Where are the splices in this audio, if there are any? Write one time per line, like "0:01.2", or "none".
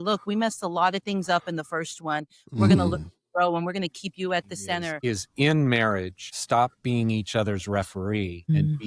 0:04.9

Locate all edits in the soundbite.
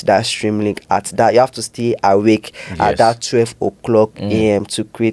none

